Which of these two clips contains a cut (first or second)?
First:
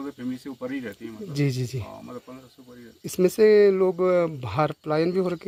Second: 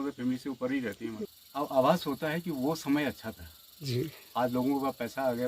second